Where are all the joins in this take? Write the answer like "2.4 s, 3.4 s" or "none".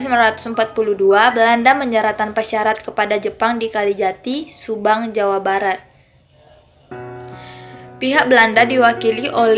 none